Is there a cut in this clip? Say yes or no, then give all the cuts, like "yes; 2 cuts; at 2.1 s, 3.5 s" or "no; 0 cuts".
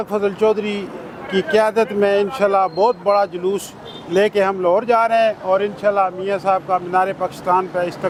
no; 0 cuts